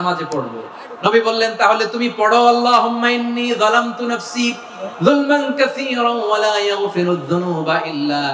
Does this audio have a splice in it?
no; 0 cuts

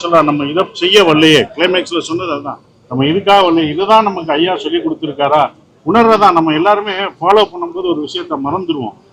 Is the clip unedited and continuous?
yes; 0 cuts

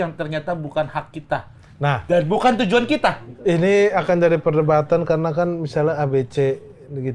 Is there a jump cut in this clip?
no; 0 cuts

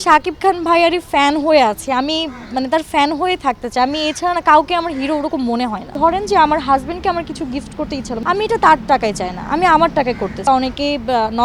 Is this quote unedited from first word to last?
no; 3 cuts; at 5.9 s, 8.1 s, 10.5 s

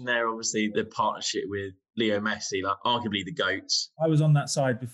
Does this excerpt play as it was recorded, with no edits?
no; 4 cuts; at 0.7 s, 1.8 s, 2.8 s, 3.9 s

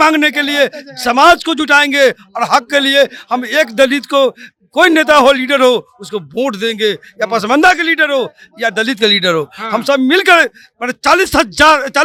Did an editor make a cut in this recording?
no; 0 cuts

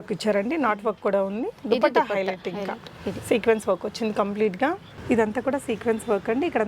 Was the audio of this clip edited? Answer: yes; 1 cut; at 5.0 s

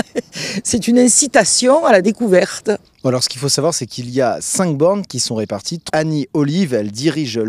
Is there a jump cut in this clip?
no; 0 cuts

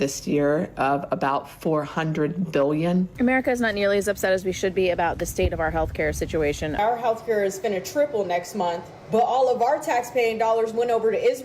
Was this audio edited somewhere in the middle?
yes; 3 cuts; at 3.2 s, 6.8 s, 8.9 s

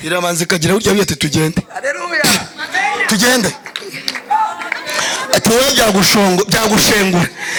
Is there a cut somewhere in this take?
no; 0 cuts

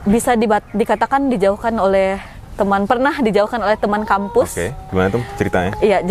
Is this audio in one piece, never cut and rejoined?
yes; 0 cuts

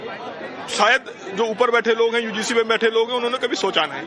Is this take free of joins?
no; 1 cut; at 2.9 s

